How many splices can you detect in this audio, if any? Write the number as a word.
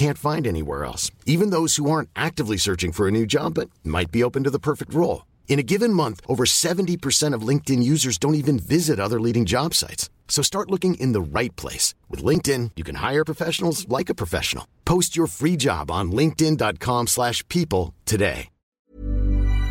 one